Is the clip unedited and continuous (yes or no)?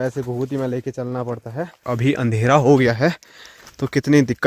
no